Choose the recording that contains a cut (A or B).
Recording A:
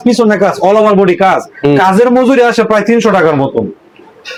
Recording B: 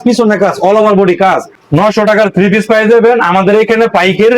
B